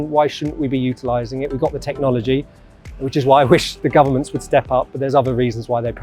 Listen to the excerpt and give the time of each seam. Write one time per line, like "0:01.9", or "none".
none